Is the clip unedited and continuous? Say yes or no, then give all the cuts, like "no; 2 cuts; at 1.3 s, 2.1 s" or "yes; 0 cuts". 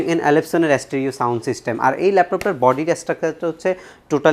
yes; 0 cuts